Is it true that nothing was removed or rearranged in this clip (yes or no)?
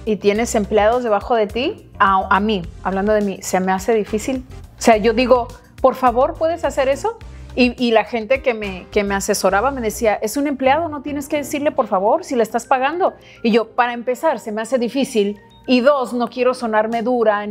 yes